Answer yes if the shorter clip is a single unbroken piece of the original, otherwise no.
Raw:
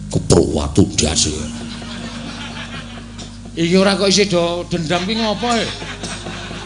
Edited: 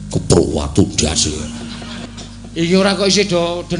no